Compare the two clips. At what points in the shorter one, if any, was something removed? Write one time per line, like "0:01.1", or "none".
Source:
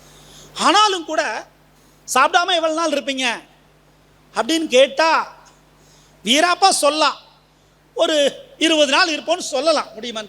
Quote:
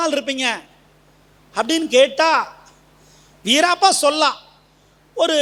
none